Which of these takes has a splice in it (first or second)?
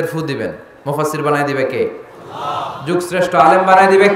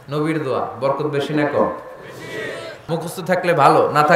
second